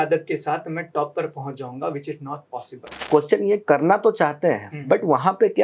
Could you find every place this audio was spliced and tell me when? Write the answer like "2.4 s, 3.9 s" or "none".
3.0 s